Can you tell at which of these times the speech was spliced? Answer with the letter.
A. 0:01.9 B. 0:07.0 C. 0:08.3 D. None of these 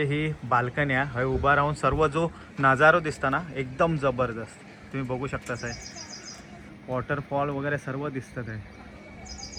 D